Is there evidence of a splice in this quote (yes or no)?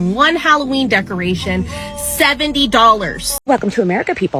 yes